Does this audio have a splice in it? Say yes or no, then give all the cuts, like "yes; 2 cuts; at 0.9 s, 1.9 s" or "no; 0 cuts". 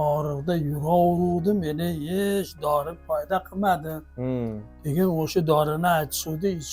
no; 0 cuts